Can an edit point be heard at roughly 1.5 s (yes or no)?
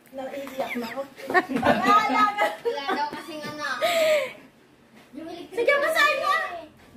yes